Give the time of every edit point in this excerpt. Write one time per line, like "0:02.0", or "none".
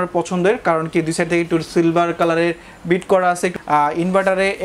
0:03.5